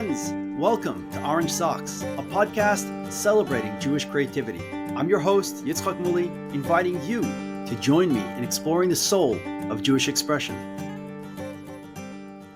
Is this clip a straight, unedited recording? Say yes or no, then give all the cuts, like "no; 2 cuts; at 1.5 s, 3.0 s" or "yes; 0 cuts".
yes; 0 cuts